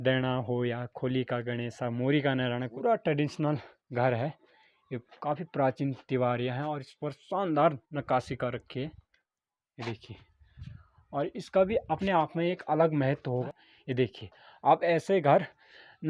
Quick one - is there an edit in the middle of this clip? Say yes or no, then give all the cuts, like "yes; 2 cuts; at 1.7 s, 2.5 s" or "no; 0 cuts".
yes; 2 cuts; at 2.7 s, 13.5 s